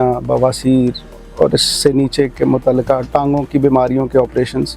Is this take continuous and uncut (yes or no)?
yes